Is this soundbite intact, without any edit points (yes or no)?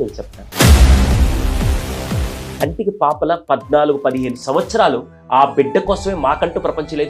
no